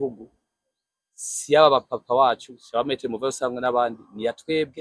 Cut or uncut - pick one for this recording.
uncut